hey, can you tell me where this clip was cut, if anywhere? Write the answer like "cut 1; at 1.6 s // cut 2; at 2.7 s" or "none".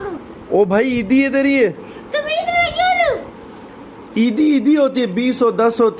none